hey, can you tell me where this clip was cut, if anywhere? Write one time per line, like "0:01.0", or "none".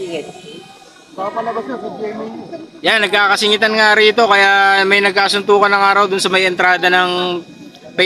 none